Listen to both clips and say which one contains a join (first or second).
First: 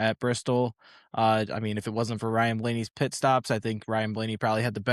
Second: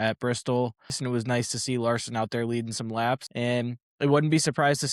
second